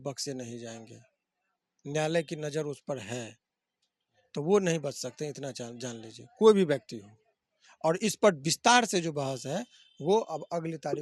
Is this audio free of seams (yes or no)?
yes